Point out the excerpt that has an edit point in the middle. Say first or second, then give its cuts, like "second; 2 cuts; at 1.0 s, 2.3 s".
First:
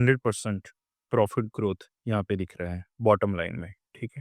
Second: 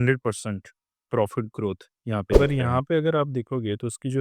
second; 1 cut; at 2.3 s